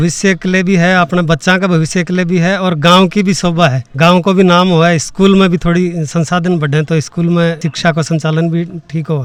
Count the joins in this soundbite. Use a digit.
0